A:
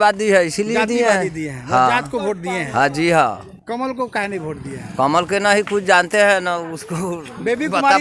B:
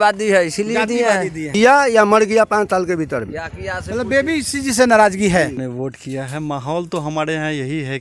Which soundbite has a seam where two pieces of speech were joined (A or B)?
B